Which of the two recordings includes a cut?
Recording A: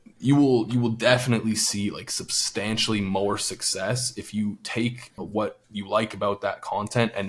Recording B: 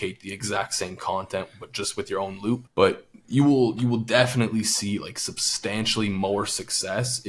A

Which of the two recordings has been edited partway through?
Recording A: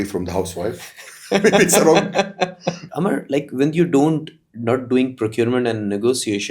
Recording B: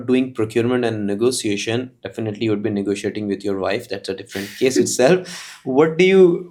A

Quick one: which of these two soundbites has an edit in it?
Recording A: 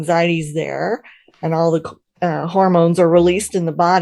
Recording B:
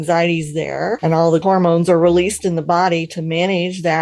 B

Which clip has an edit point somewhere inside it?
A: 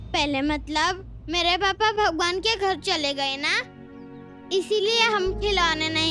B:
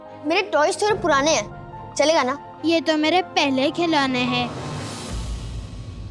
B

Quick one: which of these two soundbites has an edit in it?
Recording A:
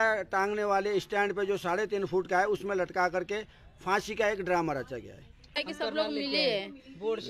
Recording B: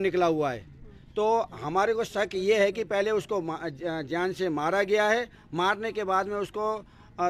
A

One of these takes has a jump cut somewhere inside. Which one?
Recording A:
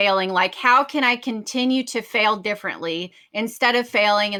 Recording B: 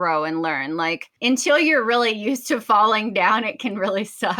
B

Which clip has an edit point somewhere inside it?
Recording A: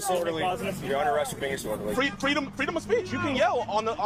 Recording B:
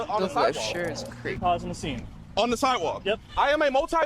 B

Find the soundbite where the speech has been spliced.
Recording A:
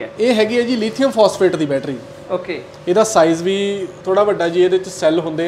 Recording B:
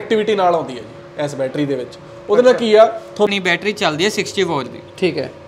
B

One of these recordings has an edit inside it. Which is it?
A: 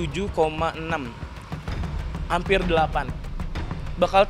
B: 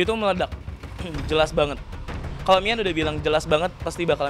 B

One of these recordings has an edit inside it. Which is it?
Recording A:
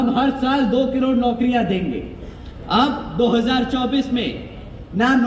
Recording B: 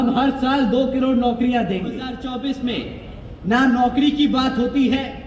B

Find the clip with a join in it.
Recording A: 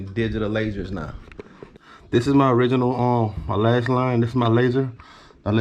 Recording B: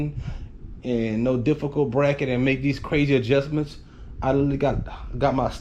A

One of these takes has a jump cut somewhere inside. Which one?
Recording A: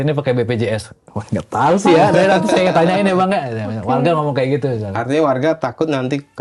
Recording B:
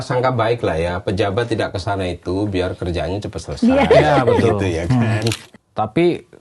B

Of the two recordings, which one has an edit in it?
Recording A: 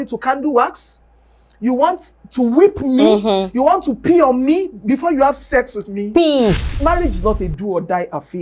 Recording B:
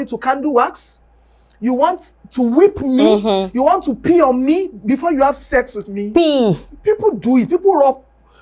A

